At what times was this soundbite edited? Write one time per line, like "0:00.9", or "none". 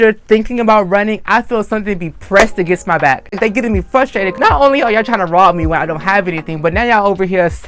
0:03.4